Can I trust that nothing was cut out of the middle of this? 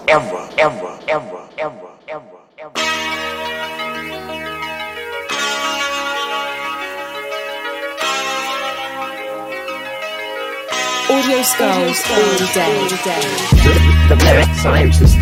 yes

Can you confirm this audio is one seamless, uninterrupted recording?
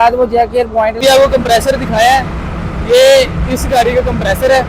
no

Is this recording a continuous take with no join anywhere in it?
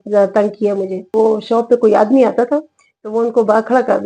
no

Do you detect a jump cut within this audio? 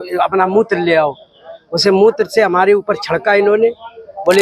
no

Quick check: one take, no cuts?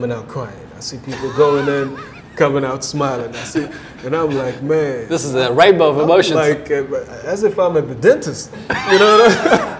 yes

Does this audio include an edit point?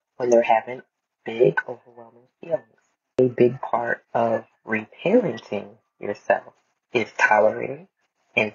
yes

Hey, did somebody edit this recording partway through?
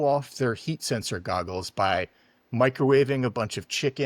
no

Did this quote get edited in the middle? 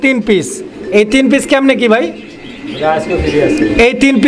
no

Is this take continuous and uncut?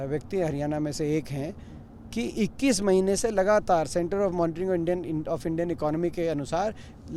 yes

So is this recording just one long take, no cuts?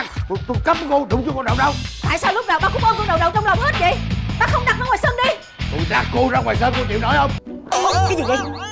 no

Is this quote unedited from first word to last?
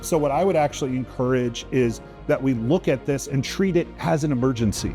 yes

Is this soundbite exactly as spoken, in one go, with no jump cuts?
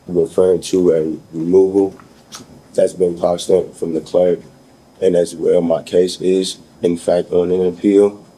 yes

